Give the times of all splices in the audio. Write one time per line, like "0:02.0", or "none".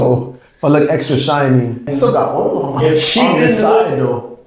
0:01.9